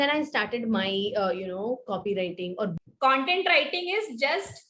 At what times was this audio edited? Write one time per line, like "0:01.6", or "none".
0:02.7